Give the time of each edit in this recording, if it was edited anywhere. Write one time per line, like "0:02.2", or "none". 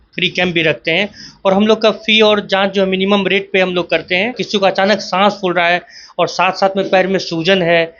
0:04.4